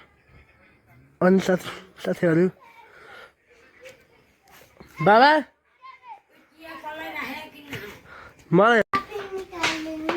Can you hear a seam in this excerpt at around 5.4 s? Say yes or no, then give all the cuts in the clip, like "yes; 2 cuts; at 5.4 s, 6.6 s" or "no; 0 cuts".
no; 1 cut; at 8.8 s